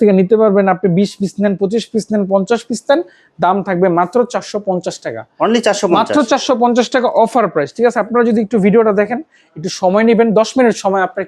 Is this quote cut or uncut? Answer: uncut